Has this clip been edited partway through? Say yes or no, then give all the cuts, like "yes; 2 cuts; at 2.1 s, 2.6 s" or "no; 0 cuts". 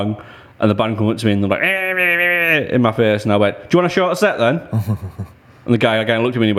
no; 0 cuts